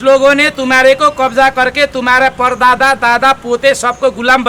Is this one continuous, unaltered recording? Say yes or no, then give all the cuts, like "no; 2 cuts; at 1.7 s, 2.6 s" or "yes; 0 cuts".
yes; 0 cuts